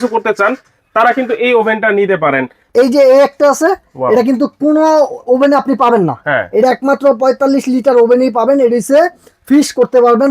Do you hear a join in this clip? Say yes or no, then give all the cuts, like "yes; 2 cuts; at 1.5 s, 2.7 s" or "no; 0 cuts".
yes; 1 cut; at 2.6 s